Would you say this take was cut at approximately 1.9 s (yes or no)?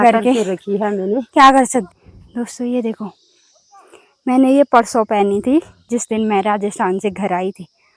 yes